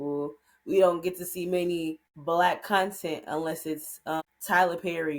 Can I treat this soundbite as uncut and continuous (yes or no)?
no